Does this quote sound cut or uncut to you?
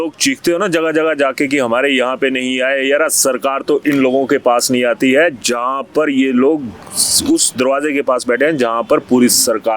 uncut